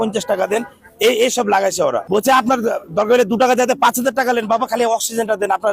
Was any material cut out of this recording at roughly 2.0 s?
yes; 1 cut; at 2.0 s

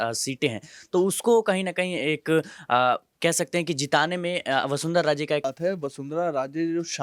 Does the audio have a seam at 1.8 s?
no; 1 cut; at 5.5 s

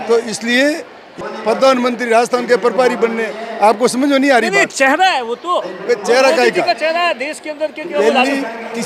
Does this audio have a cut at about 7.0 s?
no; 1 cut; at 1.1 s

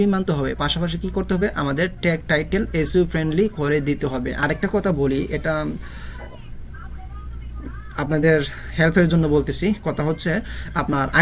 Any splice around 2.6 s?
no; 1 cut; at 4.4 s

